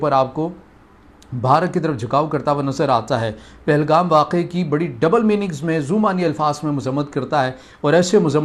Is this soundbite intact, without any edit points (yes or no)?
yes